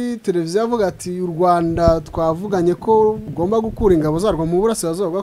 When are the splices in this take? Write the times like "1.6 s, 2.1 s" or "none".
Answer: 3.3 s